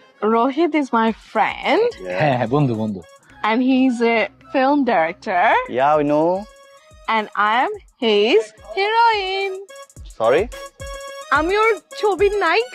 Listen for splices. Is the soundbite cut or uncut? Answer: uncut